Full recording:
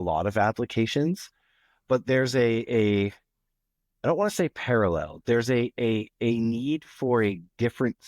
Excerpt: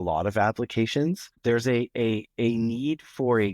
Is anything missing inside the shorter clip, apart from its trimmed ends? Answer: yes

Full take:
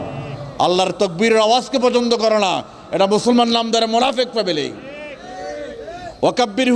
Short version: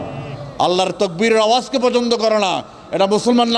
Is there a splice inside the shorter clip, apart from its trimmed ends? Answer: no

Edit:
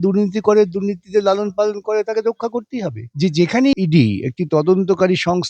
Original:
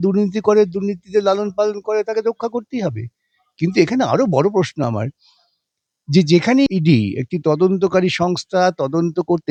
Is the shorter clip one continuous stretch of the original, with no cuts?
no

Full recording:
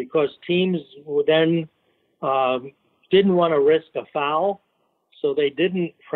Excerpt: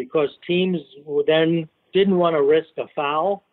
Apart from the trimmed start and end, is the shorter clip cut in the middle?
yes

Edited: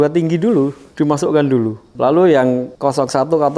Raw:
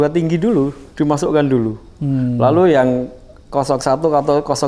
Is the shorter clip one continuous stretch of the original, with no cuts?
no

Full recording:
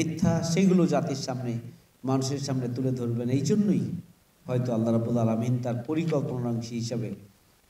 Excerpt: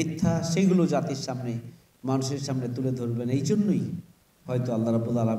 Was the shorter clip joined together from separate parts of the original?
no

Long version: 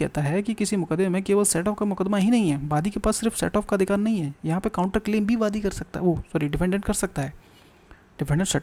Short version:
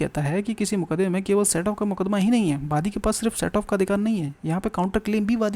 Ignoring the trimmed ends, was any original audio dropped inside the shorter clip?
no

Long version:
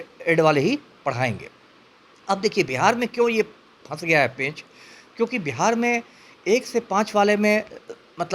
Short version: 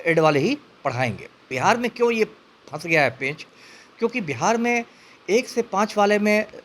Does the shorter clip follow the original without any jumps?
no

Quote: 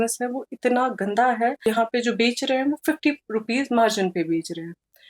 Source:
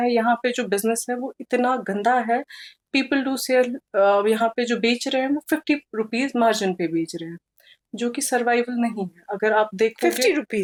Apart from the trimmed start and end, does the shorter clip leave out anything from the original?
yes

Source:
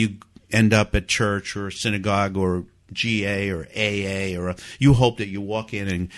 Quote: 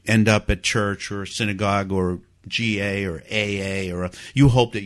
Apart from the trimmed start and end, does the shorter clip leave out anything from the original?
no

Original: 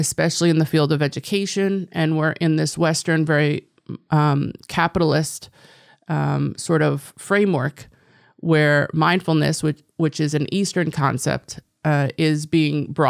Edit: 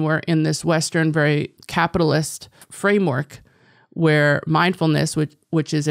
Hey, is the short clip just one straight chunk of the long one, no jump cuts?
no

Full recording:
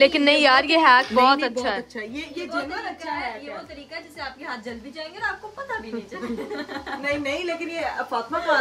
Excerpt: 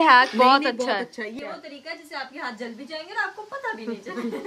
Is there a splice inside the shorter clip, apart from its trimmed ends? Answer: yes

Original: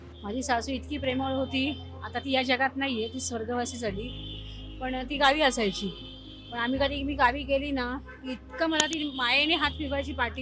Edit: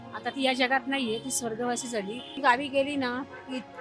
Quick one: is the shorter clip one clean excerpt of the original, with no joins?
no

